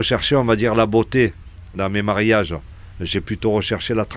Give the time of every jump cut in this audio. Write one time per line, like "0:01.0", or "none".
0:01.7